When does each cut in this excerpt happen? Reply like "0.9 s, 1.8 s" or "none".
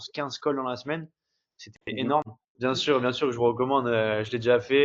2.5 s